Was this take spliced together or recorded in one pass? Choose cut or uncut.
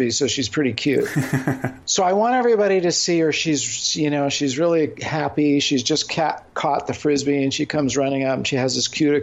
cut